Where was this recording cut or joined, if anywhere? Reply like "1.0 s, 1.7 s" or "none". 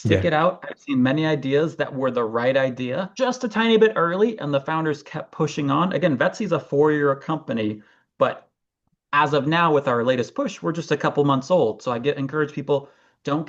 3.1 s

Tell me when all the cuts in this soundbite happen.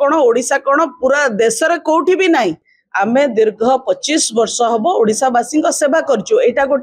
2.6 s

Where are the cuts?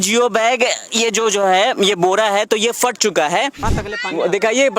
3.7 s

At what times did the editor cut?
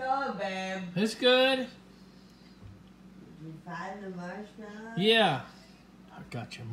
none

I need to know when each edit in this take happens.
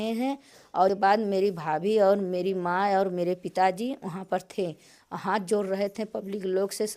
0.9 s

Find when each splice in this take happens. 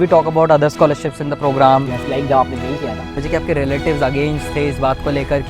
3.2 s

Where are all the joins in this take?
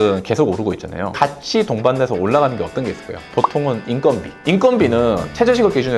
1.1 s, 4.3 s

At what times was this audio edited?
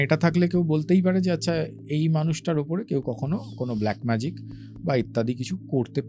none

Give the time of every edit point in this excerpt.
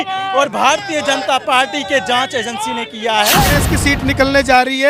3.5 s

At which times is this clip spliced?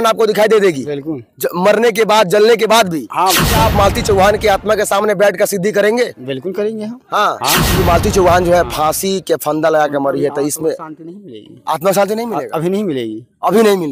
3.6 s, 7.7 s

